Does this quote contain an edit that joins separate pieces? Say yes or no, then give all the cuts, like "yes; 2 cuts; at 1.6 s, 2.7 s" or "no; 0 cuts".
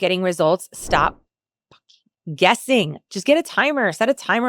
no; 0 cuts